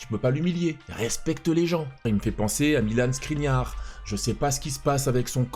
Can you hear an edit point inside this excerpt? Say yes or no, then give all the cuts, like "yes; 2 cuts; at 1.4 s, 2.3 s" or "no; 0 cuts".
yes; 1 cut; at 2.0 s